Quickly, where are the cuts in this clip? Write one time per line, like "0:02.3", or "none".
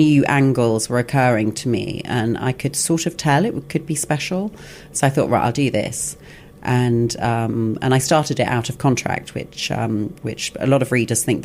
none